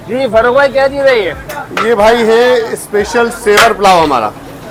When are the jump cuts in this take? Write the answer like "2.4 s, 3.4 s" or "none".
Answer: none

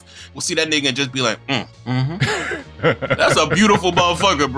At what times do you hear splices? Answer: 2.0 s, 3.2 s

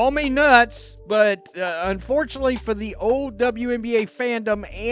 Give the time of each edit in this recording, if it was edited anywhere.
none

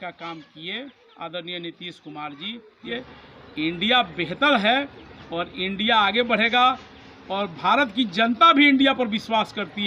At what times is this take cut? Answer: 2.9 s

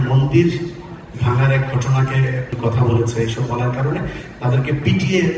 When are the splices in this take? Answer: 2.5 s

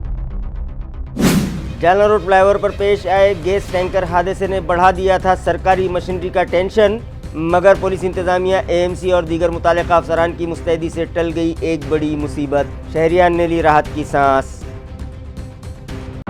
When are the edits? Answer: 1.2 s

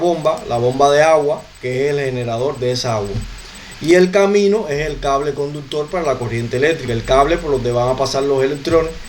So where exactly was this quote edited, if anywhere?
none

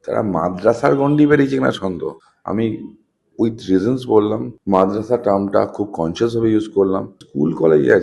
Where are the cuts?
none

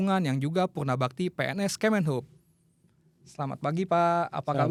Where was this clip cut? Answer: none

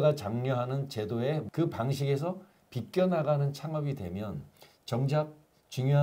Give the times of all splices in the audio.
1.5 s

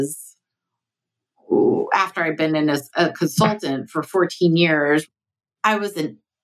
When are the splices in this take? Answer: 5.0 s

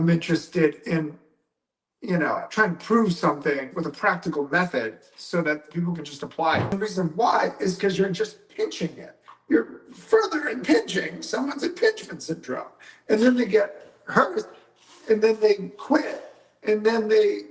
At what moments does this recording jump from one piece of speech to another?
6.7 s

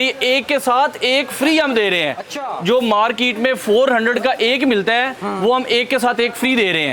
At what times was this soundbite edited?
none

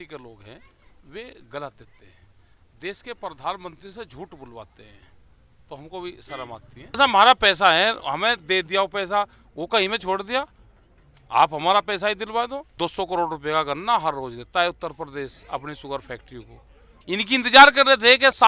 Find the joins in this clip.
7.0 s, 12.6 s, 16.9 s

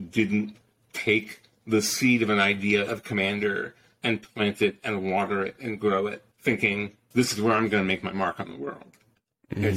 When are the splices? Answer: 3.8 s, 6.3 s, 7.0 s

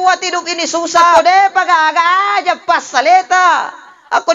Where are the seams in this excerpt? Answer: 1.2 s

